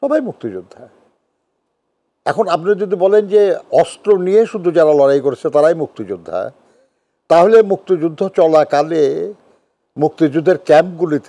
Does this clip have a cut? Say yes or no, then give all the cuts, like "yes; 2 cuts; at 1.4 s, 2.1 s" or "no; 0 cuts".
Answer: no; 0 cuts